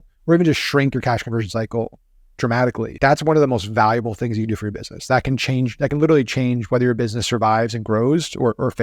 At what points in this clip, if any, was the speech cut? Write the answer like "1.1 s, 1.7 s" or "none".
2.9 s